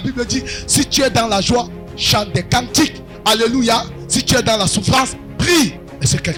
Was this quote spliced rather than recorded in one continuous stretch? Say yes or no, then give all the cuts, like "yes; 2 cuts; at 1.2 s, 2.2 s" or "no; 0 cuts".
no; 0 cuts